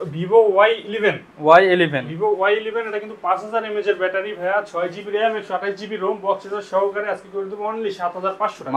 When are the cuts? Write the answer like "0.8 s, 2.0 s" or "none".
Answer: none